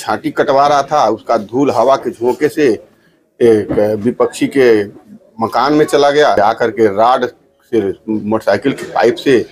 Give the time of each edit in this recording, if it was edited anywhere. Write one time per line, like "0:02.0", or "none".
0:06.4